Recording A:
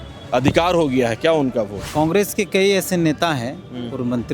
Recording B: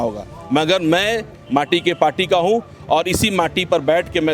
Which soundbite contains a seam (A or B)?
A